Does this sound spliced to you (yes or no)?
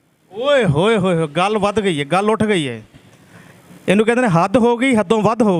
no